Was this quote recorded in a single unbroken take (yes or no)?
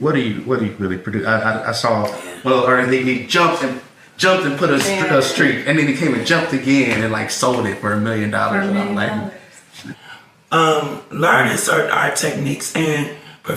no